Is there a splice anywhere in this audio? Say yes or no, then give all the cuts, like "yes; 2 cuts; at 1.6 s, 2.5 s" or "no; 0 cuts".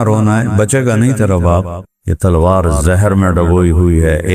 no; 0 cuts